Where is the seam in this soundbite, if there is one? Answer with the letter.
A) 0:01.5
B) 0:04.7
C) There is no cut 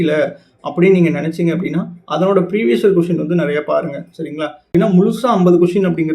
B